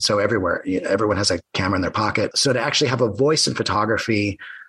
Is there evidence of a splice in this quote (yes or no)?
yes